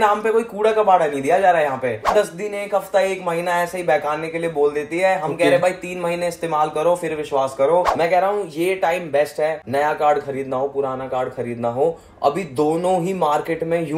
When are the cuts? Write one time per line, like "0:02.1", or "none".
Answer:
0:02.1
0:07.9